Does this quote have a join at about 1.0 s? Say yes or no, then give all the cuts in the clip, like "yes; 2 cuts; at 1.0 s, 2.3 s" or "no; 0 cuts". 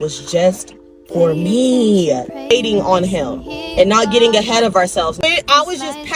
no; 2 cuts; at 2.5 s, 5.2 s